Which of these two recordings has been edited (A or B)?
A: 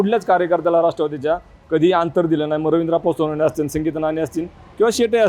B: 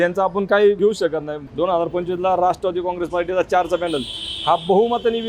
B